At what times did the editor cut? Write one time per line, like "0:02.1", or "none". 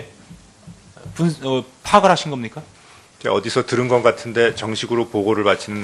0:03.3